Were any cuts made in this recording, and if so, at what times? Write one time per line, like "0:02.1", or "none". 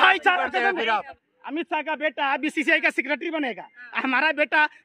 0:01.1